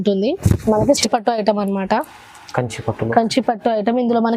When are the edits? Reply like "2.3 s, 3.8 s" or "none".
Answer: 1.0 s